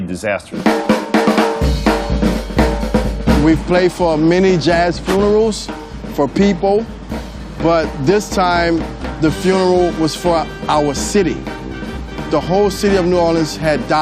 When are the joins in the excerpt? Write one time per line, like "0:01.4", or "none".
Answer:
0:02.8